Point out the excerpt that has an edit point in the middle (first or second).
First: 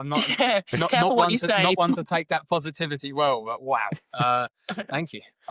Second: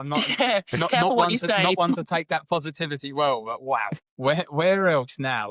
second